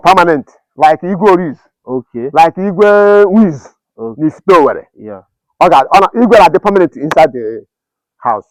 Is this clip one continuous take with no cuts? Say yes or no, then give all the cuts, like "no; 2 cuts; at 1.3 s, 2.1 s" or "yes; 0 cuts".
yes; 0 cuts